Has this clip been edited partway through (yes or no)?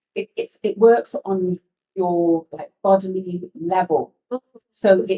no